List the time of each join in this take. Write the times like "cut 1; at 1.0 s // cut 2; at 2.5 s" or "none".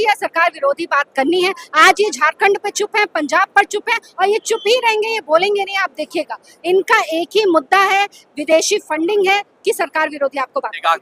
none